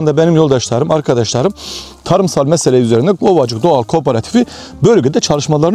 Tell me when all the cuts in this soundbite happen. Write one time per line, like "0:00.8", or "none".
none